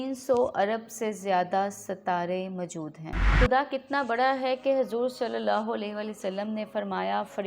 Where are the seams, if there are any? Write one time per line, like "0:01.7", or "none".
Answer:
0:03.2